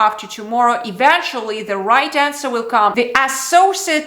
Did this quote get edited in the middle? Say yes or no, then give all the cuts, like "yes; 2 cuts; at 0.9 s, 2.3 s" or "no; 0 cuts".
yes; 1 cut; at 2.9 s